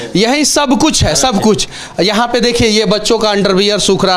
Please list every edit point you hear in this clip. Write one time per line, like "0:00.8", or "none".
none